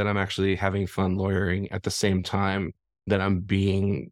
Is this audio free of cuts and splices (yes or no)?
yes